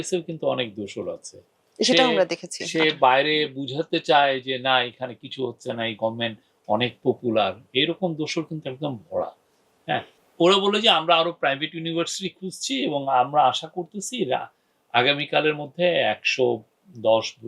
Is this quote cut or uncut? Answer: cut